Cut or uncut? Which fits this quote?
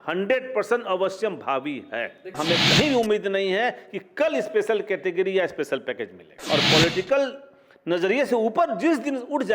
cut